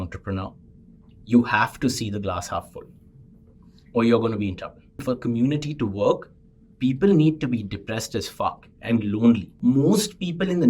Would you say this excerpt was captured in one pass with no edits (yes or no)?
no